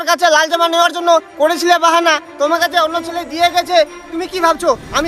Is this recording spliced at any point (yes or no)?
no